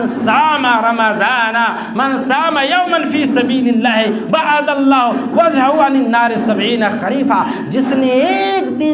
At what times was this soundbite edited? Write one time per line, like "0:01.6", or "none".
none